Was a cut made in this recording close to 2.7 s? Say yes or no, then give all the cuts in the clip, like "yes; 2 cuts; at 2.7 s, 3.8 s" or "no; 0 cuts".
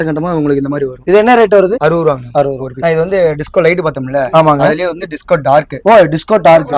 yes; 2 cuts; at 1.0 s, 2.7 s